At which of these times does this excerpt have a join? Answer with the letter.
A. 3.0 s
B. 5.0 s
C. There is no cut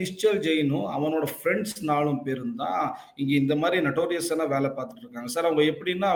C